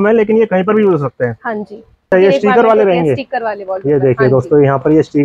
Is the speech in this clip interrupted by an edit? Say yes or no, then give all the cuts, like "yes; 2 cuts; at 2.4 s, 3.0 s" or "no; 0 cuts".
yes; 1 cut; at 2.1 s